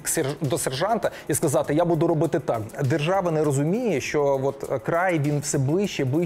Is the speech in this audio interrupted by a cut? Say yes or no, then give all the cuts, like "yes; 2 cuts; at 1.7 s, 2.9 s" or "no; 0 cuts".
yes; 1 cut; at 2.7 s